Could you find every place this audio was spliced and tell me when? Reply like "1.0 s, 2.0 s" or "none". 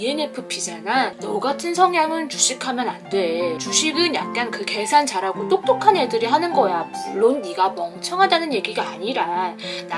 1.2 s